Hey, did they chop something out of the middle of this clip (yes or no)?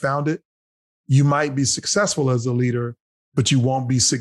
no